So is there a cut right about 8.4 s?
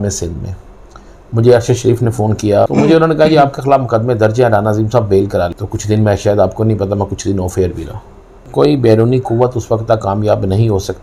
yes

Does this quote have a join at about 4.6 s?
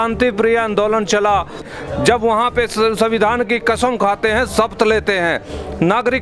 no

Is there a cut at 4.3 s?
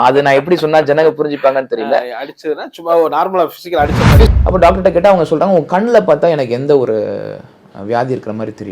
yes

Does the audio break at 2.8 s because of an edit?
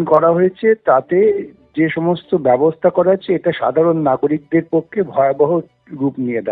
no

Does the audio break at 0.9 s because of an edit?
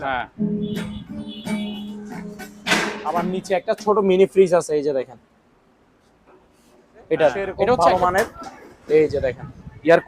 no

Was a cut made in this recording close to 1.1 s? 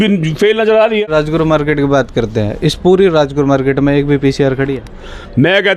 yes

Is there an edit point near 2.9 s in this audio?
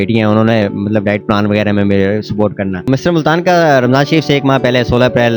yes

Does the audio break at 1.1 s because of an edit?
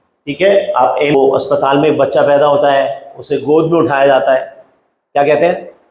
yes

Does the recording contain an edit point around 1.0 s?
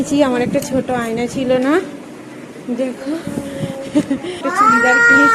no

